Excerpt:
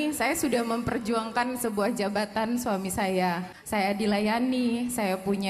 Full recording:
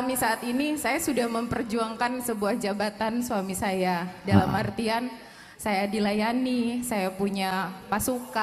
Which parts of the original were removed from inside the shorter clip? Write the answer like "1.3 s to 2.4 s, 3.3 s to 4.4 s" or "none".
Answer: 4.1 s to 5.4 s